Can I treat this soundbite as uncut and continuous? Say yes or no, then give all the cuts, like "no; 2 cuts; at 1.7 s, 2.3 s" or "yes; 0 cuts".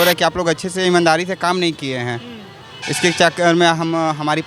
yes; 0 cuts